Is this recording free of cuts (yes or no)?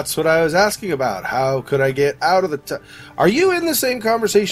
yes